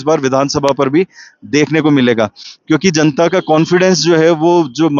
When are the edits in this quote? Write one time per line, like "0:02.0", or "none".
none

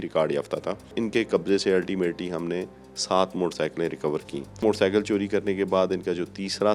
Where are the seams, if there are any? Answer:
0:01.0
0:04.6

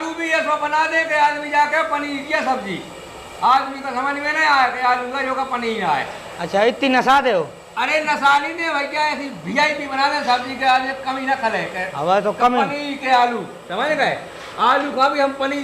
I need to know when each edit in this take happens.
none

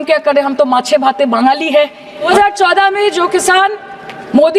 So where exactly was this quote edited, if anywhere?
0:02.3

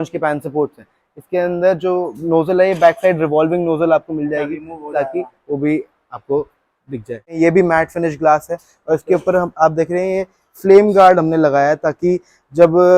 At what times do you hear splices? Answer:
0:07.3

